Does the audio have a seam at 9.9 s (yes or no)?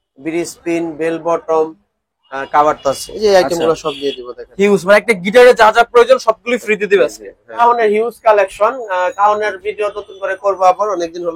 no